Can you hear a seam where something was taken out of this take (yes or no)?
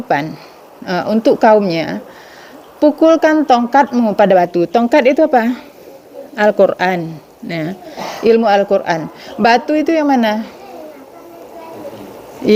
no